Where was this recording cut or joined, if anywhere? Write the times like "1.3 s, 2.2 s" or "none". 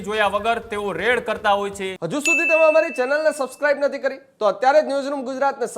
2.0 s